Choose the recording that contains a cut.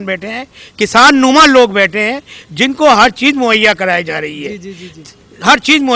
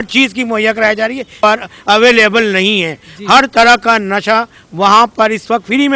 second; 1 cut; at 1.4 s

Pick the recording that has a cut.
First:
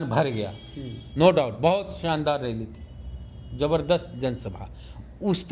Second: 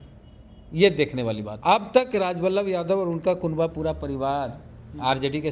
second; 1 cut; at 1.5 s

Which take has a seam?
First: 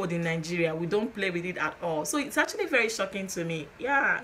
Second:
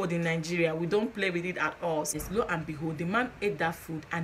second; 1 cut; at 2.1 s

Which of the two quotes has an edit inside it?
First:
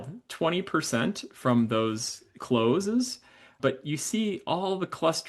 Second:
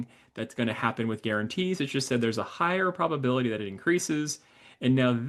first; 1 cut; at 2.3 s

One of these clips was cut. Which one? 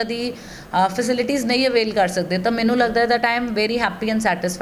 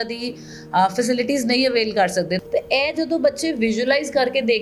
second; 1 cut; at 2.4 s

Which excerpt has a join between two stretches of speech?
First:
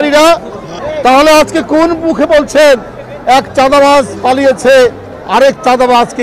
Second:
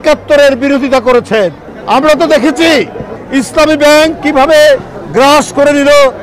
second; 1 cut; at 1.7 s

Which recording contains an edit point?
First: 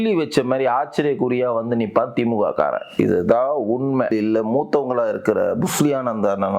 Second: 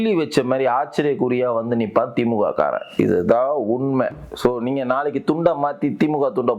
first; 1 cut; at 4.1 s

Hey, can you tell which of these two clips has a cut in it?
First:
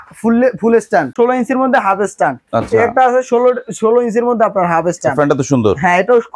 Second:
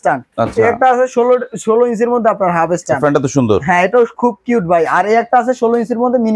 first; 1 cut; at 1.1 s

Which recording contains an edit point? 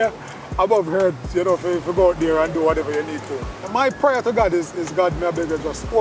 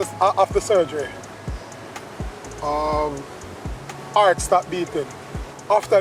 first; 1 cut; at 3.6 s

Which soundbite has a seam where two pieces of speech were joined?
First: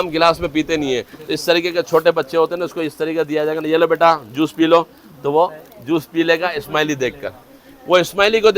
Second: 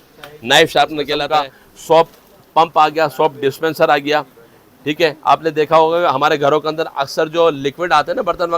second; 1 cut; at 0.9 s

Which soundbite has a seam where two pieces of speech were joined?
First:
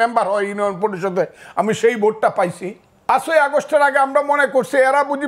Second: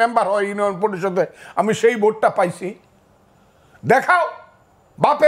first; 1 cut; at 3.1 s

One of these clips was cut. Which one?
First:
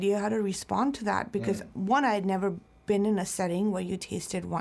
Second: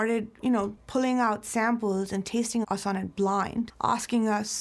second; 2 cuts; at 2.6 s, 3.7 s

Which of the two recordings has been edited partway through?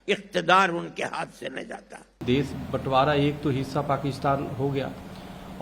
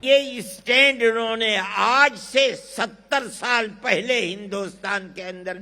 first; 1 cut; at 2.2 s

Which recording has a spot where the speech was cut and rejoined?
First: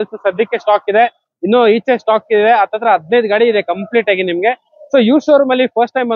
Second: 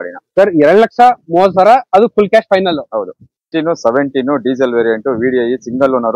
second; 1 cut; at 3.4 s

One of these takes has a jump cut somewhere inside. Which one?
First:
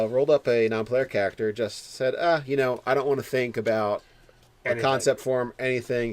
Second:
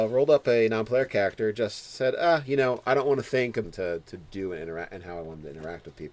first; 1 cut; at 3.6 s

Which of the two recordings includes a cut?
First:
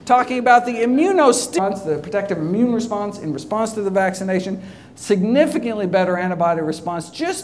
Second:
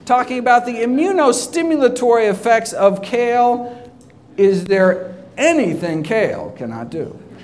second; 1 cut; at 1.5 s

